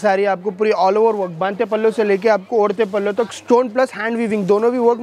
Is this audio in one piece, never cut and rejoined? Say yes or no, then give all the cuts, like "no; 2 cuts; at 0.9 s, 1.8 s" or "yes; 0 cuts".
yes; 0 cuts